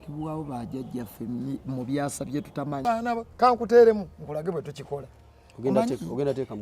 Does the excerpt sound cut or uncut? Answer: cut